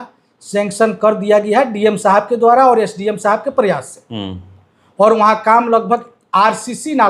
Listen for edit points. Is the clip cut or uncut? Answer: uncut